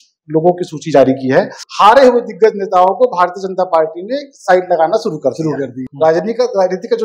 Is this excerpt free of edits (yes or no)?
no